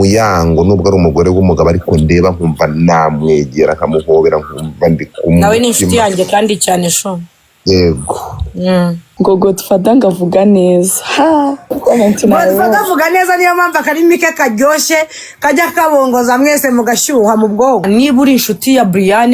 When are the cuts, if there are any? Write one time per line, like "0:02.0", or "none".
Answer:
0:09.0
0:11.7
0:17.8